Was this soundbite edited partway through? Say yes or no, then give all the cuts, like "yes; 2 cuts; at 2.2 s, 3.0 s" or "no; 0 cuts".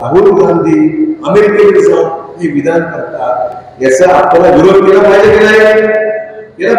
no; 0 cuts